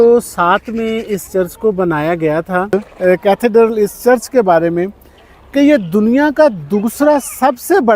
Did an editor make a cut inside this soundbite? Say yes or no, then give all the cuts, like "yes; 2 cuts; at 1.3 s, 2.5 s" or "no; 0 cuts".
yes; 1 cut; at 2.7 s